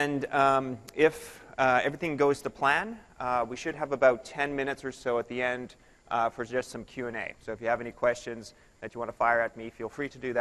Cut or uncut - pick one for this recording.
uncut